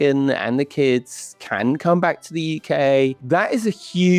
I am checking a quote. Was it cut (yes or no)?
yes